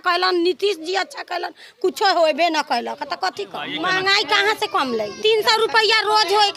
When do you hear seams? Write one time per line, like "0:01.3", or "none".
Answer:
0:03.7
0:05.1